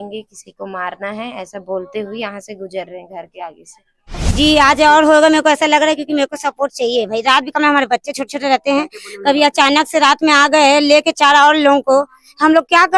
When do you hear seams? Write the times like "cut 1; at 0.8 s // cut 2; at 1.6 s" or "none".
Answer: cut 1; at 4.2 s